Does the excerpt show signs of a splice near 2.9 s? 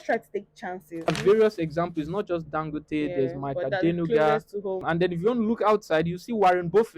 no; 2 cuts; at 1.1 s, 4.8 s

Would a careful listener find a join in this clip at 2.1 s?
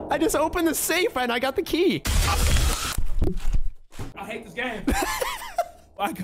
yes; 2 cuts; at 2.1 s, 4.0 s

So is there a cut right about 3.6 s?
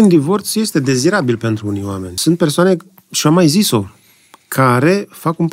no; 1 cut; at 2.1 s

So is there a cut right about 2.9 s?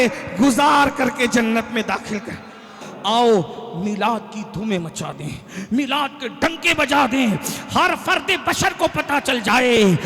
yes; 1 cut; at 2.9 s

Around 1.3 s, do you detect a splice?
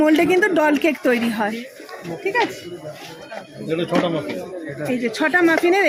no; 0 cuts

